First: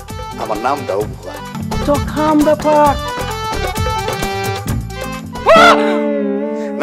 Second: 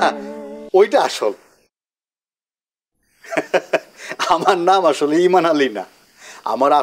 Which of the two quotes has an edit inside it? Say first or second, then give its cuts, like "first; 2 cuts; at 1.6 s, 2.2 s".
first; 1 cut; at 1.6 s